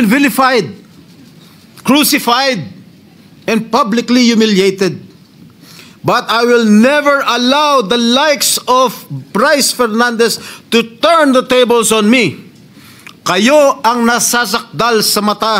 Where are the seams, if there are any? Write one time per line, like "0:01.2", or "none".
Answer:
none